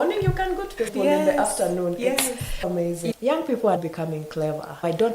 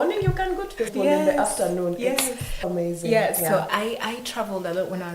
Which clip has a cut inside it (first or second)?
first